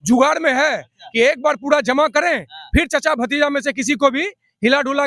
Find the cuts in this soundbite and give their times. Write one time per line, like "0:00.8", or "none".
none